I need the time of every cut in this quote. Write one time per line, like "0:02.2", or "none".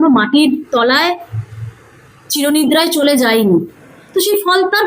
0:03.7